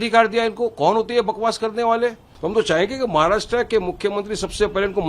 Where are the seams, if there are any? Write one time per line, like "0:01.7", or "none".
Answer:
0:02.3